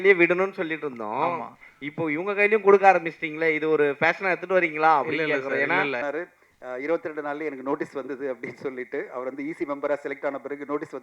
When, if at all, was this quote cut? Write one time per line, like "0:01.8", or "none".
0:06.0